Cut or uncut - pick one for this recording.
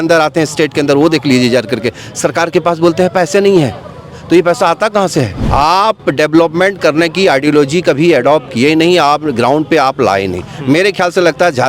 cut